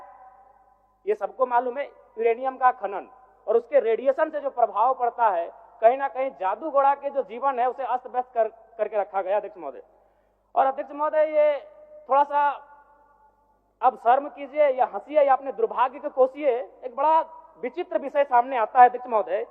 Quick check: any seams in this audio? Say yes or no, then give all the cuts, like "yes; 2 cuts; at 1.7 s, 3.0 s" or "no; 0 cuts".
no; 0 cuts